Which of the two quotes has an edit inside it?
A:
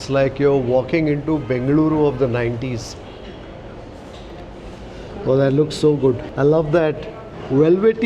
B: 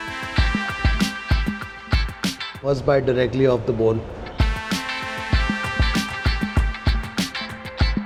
A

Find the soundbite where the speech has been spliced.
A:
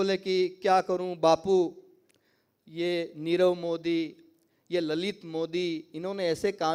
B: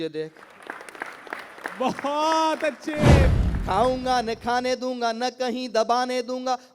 B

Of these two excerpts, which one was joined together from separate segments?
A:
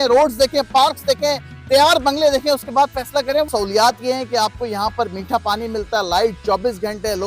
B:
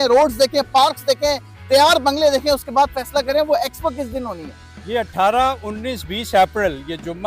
A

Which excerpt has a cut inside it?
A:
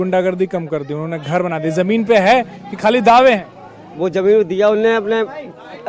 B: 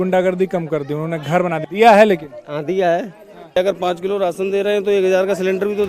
B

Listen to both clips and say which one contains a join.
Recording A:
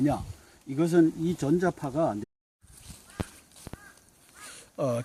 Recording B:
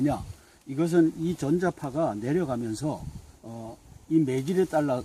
B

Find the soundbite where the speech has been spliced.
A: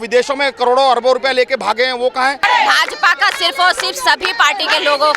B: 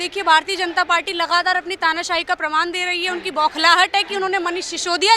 A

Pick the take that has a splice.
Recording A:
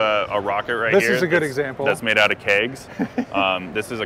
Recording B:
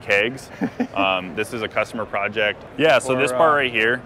B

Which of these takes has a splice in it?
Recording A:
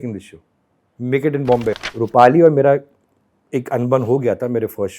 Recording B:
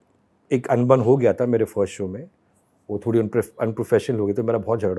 A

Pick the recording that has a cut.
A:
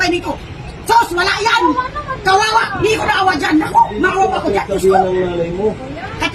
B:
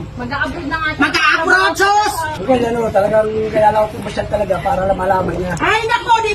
B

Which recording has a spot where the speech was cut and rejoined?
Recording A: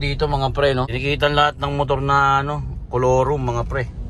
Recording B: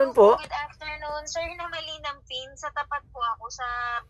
A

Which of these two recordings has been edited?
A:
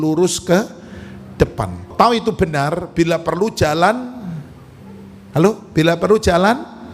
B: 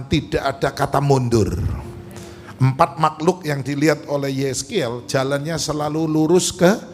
A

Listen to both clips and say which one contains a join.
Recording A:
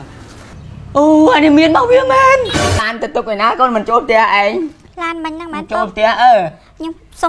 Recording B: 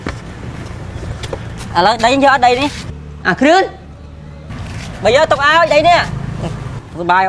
A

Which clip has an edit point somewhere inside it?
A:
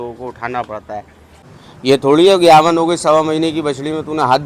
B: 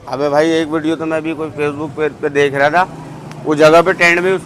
A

